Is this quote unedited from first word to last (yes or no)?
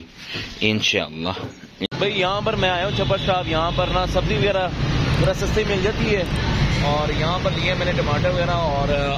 no